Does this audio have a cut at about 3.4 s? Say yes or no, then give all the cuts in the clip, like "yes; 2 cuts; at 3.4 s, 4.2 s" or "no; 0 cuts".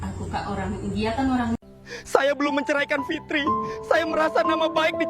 no; 1 cut; at 1.6 s